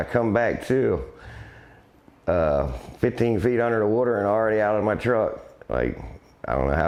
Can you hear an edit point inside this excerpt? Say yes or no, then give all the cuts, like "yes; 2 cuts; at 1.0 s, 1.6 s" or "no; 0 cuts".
no; 0 cuts